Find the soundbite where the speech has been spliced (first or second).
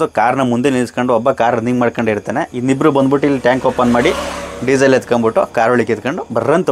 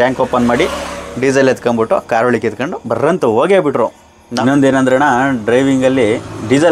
second